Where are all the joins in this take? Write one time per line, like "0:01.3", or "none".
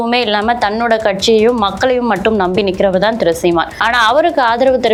none